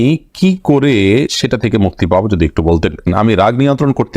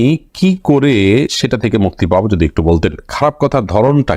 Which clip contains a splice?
first; 1 cut; at 3.0 s

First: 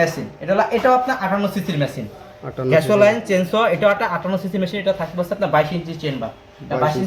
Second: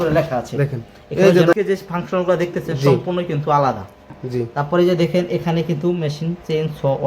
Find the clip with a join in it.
second; 1 cut; at 1.5 s

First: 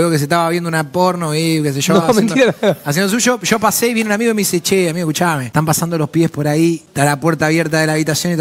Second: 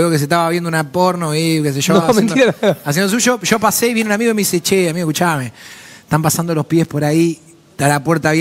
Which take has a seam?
first; 2 cuts; at 5.4 s, 6.9 s

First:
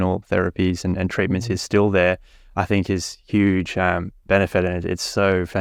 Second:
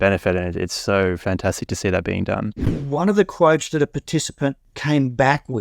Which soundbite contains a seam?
second; 2 cuts; at 2.7 s, 4.7 s

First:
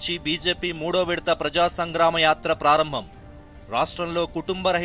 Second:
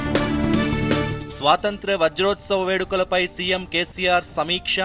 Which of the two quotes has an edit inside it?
second; 1 cut; at 1.2 s

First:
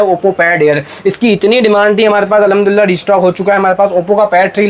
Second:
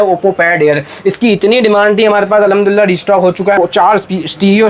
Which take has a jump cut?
second; 1 cut; at 3.6 s

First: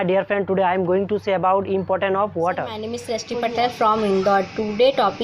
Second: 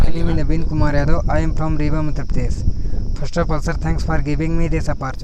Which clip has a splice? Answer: first; 1 cut; at 2.9 s

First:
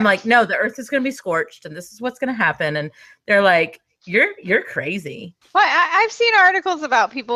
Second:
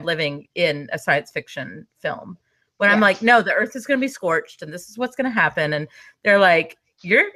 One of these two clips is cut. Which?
first; 1 cut; at 5.3 s

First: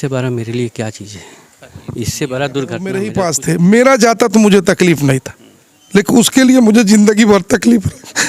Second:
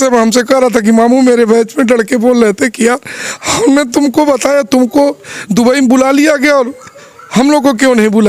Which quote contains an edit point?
first; 1 cut; at 3.1 s

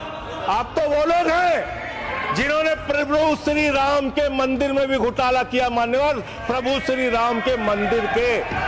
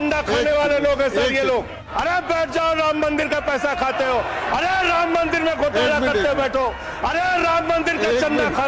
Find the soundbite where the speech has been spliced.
second; 1 cut; at 1.8 s

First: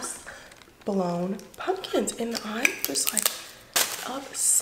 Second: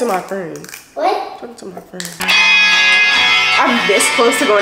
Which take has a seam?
second; 1 cut; at 2.2 s

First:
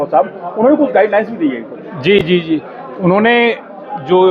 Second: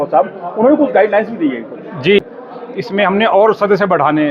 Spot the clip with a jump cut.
second; 1 cut; at 2.3 s

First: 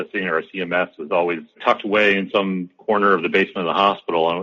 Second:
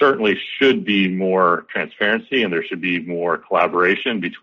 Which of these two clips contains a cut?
first; 1 cut; at 1.5 s

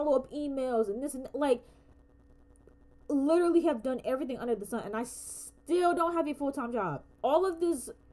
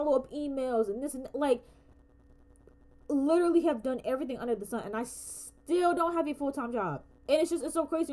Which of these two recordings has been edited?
first; 1 cut; at 7.0 s

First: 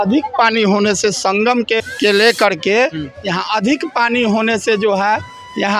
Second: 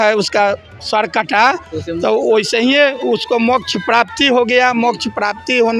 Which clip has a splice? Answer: first; 1 cut; at 1.9 s

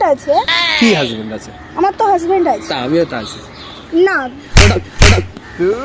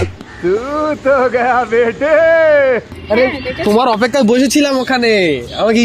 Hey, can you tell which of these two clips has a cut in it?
second; 1 cut; at 2.9 s

